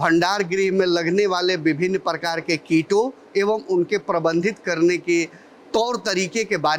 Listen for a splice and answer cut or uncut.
uncut